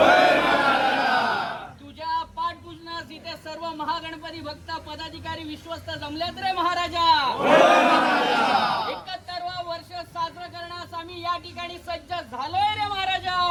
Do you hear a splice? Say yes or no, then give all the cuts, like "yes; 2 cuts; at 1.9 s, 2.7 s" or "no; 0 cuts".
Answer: no; 0 cuts